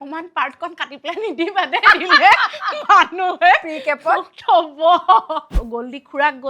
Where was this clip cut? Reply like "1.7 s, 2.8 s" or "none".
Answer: 5.6 s